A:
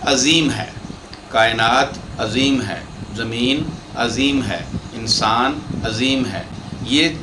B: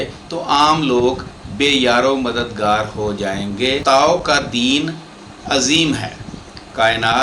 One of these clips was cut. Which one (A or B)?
B